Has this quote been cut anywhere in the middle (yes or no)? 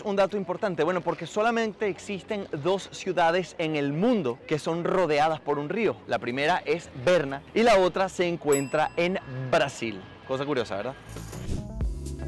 no